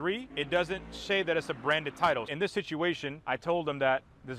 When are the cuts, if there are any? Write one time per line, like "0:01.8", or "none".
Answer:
0:02.3